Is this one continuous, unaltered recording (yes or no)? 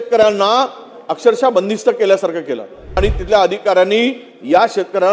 no